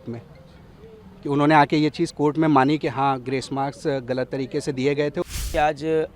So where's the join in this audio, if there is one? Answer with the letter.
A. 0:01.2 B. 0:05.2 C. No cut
B